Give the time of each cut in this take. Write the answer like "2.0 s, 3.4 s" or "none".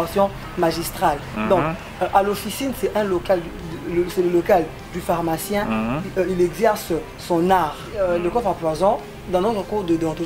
7.8 s